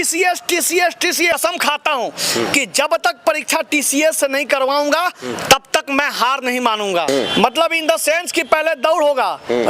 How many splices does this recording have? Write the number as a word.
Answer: two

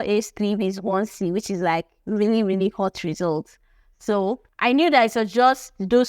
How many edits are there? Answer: one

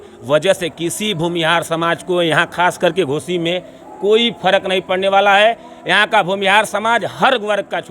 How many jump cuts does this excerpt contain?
zero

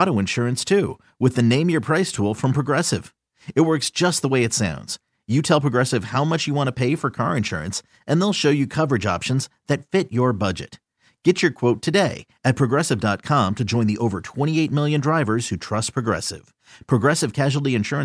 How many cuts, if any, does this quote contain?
zero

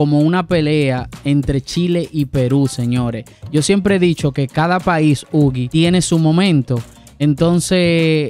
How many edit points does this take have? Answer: one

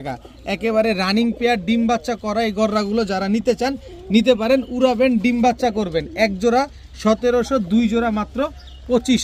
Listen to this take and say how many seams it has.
zero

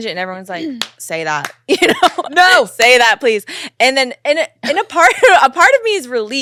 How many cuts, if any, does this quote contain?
zero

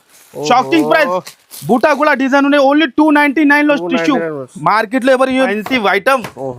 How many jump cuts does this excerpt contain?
one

